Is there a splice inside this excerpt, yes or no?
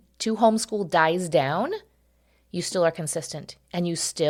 no